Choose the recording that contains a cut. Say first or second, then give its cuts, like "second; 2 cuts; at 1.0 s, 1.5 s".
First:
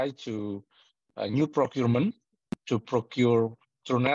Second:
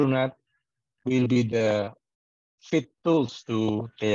second; 1 cut; at 2.9 s